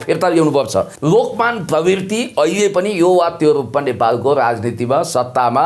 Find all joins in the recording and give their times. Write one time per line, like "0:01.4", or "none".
0:00.9